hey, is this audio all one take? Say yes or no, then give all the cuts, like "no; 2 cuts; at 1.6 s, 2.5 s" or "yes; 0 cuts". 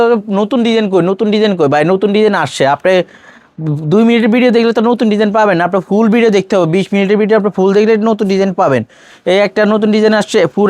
yes; 0 cuts